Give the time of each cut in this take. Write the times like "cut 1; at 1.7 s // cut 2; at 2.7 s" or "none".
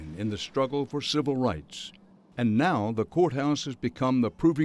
cut 1; at 1.1 s